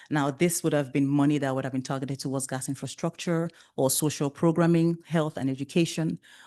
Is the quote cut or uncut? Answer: uncut